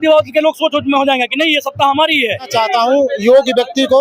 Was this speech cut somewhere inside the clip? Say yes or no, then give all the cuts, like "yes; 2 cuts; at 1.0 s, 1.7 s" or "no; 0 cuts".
yes; 1 cut; at 2.5 s